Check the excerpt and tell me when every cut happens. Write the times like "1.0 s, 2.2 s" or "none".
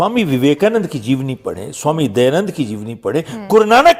none